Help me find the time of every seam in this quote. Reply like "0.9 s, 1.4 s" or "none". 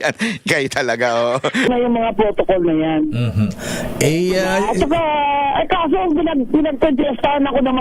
1.7 s